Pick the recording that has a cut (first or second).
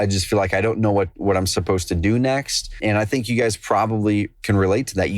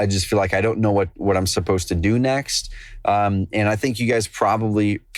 first